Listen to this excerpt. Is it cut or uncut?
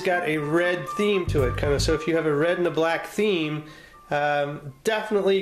uncut